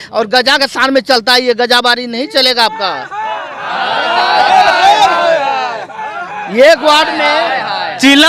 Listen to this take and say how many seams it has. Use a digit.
0